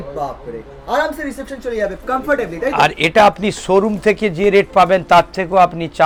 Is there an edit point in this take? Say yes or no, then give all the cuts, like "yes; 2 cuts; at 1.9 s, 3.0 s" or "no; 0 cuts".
no; 0 cuts